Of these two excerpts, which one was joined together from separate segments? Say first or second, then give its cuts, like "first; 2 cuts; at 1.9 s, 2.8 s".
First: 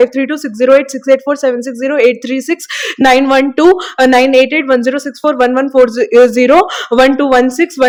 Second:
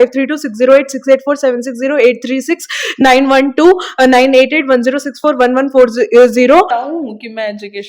second; 1 cut; at 6.7 s